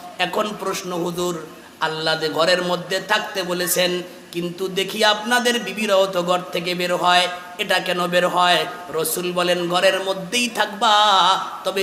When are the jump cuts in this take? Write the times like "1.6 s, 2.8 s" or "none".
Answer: none